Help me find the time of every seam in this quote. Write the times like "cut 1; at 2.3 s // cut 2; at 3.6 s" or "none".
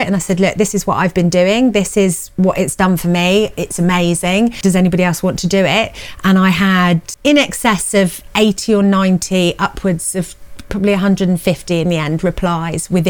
cut 1; at 4.6 s // cut 2; at 7.1 s